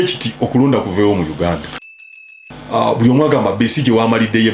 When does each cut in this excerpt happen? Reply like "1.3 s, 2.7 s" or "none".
2.1 s